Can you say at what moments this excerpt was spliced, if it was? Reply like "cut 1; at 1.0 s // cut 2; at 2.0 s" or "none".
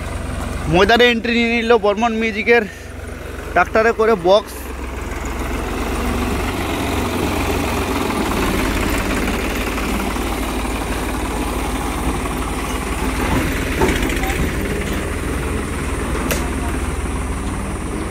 none